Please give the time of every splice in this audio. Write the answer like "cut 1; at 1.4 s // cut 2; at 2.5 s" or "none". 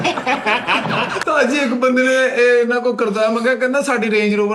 cut 1; at 1.2 s